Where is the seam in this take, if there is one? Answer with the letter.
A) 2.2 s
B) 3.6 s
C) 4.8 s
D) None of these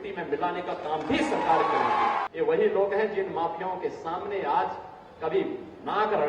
A